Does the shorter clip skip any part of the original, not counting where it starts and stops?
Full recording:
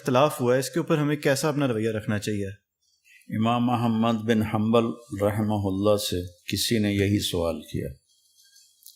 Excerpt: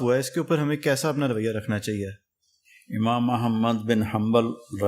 no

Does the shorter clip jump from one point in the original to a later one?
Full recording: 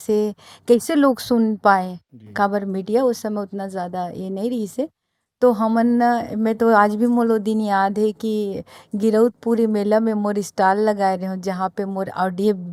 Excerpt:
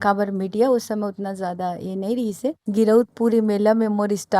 yes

